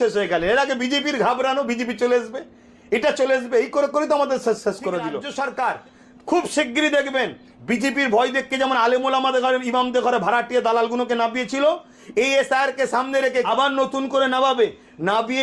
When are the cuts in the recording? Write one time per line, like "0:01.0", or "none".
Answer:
0:05.2
0:13.5